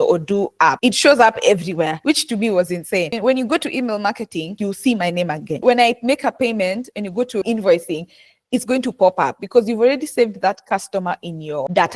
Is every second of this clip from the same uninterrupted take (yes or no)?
yes